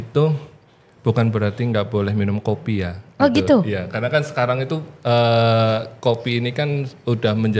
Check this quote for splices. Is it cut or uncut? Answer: uncut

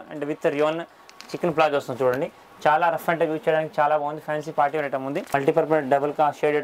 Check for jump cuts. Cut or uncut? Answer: cut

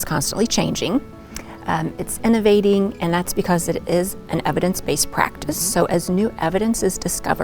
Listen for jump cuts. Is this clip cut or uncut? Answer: uncut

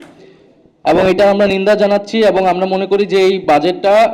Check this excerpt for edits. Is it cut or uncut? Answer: uncut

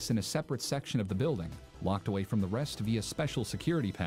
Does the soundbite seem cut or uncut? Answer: uncut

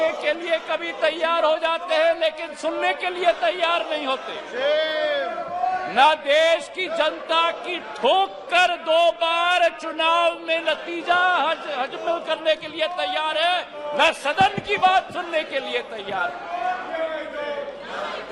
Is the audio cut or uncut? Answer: uncut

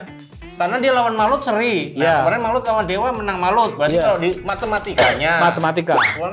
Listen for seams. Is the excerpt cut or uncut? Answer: uncut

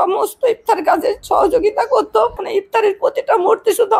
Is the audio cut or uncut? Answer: cut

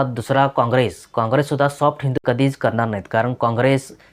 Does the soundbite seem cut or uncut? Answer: cut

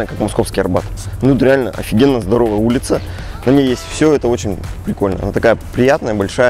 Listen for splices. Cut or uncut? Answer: uncut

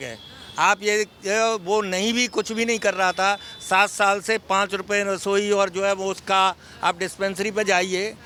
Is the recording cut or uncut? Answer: uncut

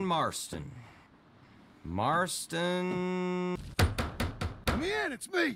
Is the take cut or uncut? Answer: cut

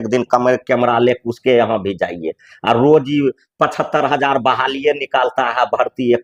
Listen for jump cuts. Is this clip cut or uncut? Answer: uncut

